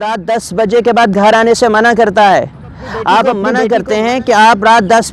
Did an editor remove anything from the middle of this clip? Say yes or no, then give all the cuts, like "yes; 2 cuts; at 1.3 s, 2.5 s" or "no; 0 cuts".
yes; 1 cut; at 3.5 s